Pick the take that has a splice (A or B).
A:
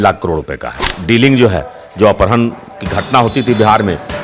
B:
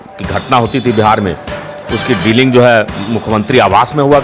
A